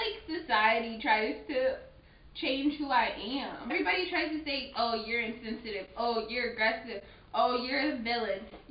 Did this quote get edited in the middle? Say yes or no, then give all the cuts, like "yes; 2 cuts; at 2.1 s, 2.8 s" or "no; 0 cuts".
yes; 1 cut; at 3.7 s